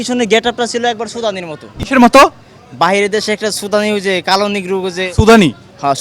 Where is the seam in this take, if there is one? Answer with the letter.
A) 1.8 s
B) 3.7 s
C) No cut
A